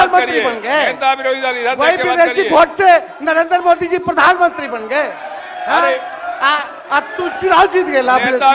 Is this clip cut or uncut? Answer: uncut